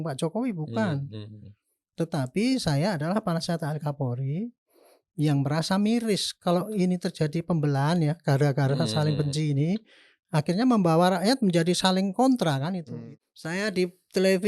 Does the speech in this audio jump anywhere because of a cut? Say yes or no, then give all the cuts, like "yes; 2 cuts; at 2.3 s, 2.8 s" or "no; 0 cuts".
yes; 1 cut; at 12.9 s